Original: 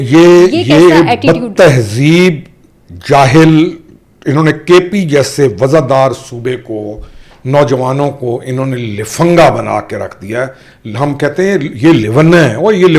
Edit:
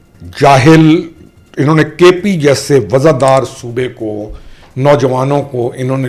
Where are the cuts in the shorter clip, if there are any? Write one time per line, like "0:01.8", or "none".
none

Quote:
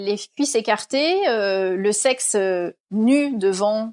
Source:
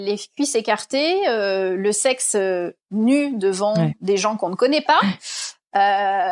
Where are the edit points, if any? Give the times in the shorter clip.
none

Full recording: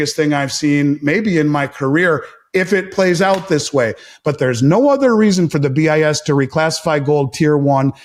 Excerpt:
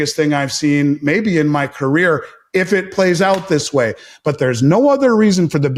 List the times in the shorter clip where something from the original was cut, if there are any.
none

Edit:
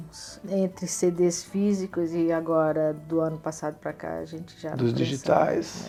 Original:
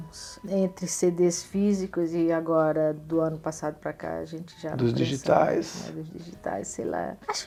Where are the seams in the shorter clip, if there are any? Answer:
none

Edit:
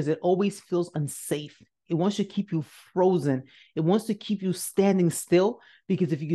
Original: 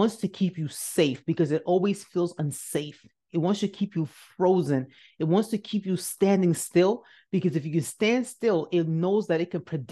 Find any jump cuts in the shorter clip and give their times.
none

